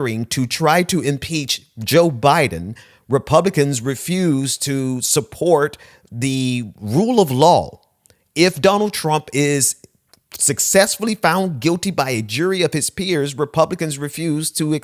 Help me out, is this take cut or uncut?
uncut